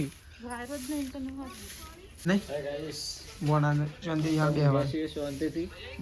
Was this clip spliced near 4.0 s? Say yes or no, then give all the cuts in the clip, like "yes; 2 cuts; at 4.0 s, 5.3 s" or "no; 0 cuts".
no; 1 cut; at 2.2 s